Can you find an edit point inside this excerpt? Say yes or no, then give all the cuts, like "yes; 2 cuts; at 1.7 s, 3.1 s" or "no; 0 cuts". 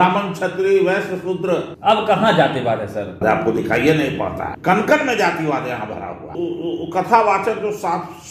yes; 4 cuts; at 1.7 s, 3.2 s, 4.5 s, 6.3 s